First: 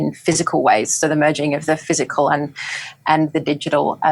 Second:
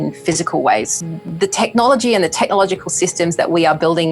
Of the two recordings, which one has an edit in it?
second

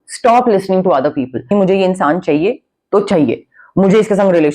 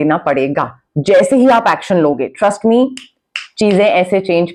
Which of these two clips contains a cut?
first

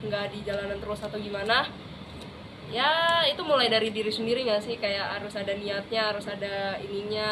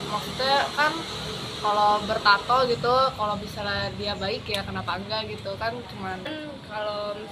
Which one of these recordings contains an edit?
second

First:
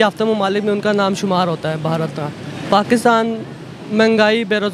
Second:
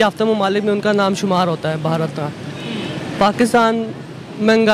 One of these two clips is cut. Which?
first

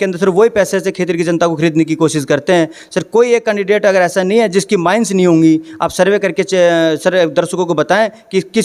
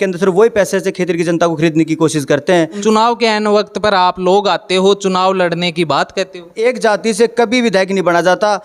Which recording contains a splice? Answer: second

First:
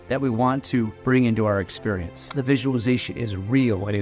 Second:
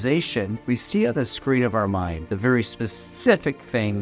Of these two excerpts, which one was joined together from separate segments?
first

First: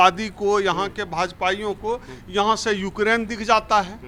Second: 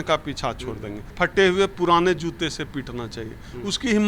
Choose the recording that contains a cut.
second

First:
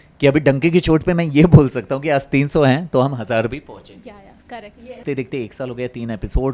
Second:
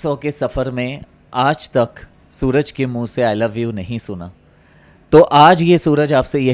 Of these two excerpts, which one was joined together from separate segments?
first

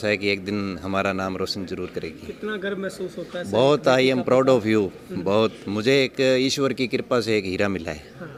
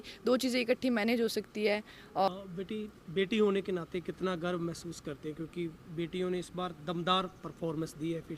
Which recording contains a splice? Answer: second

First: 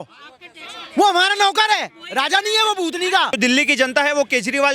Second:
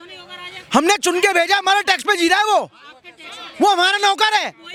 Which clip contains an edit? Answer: first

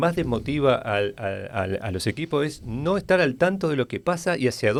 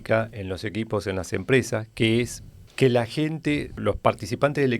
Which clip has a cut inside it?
second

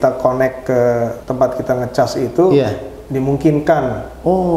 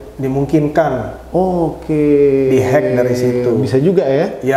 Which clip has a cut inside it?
first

